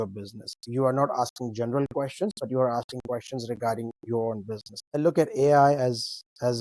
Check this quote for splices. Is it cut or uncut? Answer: cut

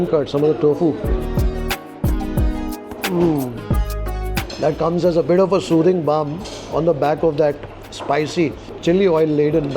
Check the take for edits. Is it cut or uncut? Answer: cut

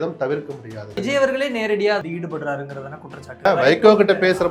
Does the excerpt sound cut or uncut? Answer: cut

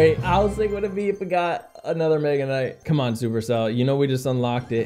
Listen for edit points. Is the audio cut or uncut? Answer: cut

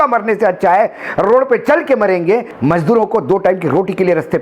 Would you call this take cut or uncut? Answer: cut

